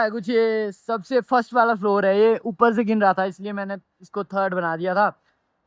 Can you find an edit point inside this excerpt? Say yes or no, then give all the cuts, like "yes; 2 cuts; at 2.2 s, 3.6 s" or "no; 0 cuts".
no; 0 cuts